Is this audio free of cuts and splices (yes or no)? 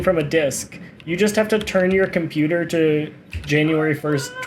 yes